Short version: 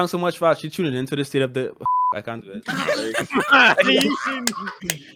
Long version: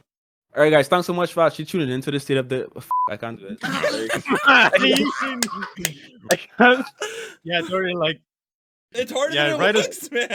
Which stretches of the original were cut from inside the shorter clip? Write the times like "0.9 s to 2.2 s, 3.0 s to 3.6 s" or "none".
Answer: none